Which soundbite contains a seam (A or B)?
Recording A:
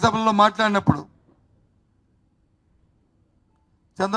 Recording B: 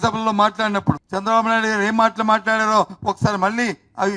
B